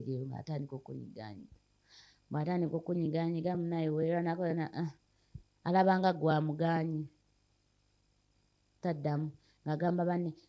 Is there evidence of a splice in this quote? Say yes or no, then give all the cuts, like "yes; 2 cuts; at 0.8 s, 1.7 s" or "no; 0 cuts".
no; 0 cuts